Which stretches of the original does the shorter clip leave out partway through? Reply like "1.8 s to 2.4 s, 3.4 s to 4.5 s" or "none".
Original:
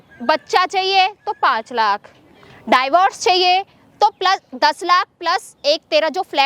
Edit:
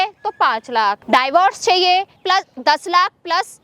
2.0 s to 2.6 s, 3.8 s to 4.2 s